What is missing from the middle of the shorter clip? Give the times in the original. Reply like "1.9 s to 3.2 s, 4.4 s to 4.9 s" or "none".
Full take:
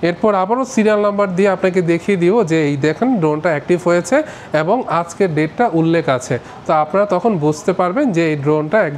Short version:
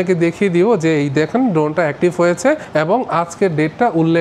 4.3 s to 4.4 s